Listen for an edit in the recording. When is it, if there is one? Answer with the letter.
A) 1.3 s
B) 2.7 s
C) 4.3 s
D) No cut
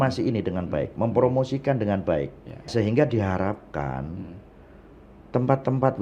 B